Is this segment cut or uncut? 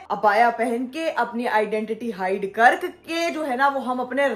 uncut